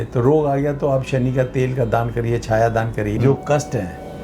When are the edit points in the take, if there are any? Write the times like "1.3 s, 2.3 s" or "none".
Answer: 3.2 s